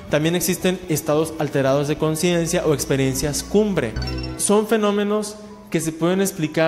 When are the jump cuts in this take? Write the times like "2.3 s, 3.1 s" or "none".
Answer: 4.2 s